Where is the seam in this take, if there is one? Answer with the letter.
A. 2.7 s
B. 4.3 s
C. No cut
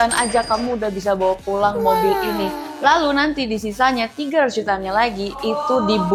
C